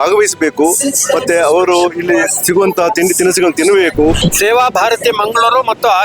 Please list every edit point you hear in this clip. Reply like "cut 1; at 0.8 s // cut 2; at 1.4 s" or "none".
cut 1; at 4.2 s